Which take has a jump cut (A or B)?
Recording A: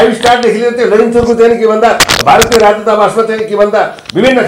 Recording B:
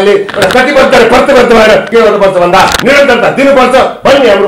B